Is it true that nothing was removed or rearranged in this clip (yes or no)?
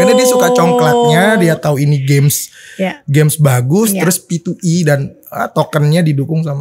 yes